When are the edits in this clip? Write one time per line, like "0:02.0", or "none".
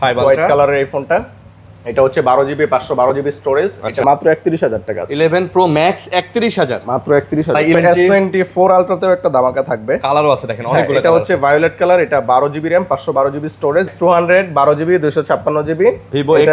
0:04.0
0:07.7
0:13.9